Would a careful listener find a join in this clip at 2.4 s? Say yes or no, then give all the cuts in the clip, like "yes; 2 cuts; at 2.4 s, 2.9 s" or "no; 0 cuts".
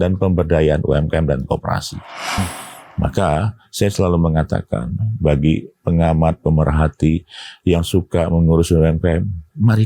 yes; 1 cut; at 2.4 s